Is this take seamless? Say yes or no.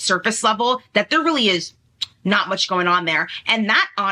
yes